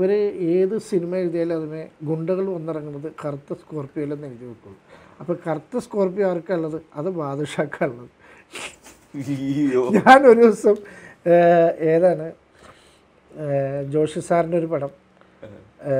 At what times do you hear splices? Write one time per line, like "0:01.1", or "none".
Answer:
none